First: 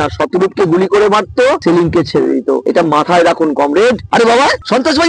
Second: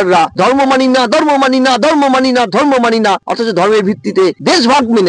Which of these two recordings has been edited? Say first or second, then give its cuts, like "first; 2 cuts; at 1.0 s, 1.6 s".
first; 3 cuts; at 1.6 s, 2.6 s, 4.1 s